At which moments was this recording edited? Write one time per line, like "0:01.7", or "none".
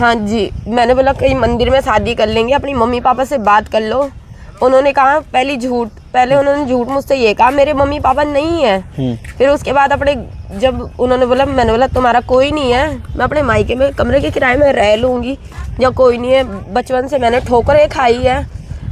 none